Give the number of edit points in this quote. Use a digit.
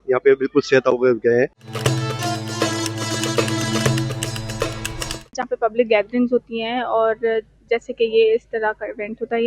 2